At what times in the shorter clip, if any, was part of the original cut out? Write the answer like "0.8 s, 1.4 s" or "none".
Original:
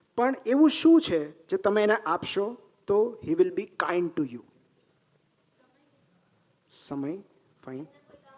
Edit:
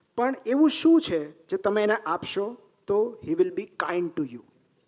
none